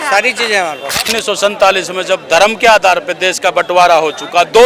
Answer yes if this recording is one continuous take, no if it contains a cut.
no